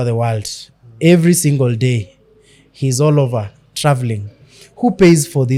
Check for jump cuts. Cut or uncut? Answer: uncut